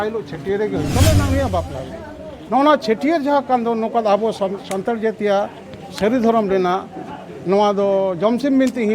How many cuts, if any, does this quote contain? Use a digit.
1